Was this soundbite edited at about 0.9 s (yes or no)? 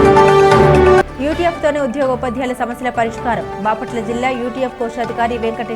yes